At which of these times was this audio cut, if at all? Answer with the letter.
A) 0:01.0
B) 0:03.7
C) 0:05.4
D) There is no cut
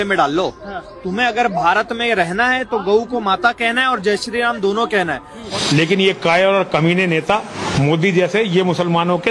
C